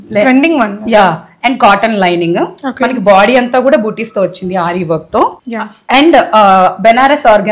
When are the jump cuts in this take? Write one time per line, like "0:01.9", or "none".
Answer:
none